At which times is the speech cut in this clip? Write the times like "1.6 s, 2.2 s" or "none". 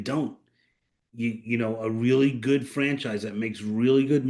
none

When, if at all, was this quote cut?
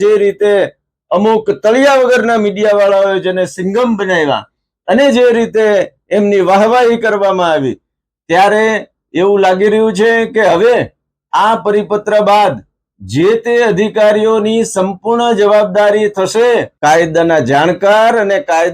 16.7 s

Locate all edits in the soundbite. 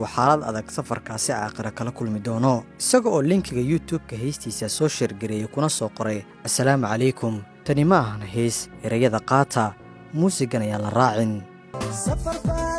2.7 s, 11.5 s

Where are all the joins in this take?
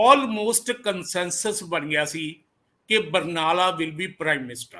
none

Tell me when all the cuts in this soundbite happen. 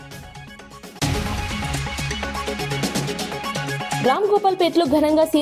1.0 s, 4.0 s

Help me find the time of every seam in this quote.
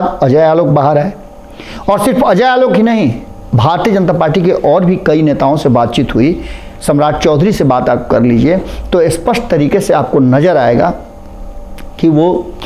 none

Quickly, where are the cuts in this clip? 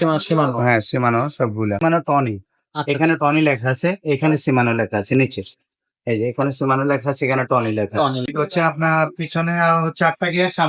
1.8 s, 8.3 s

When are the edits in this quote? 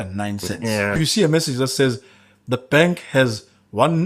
1.0 s

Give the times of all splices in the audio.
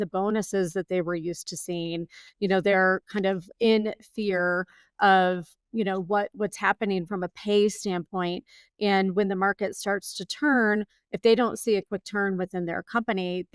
none

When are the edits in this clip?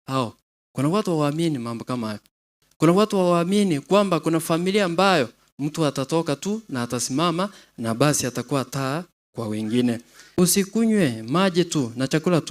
10.1 s

